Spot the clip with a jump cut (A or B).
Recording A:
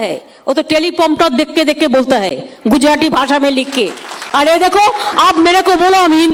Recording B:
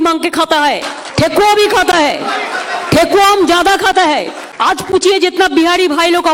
B